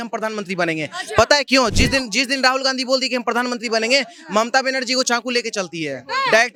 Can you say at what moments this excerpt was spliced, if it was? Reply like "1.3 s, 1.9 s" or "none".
none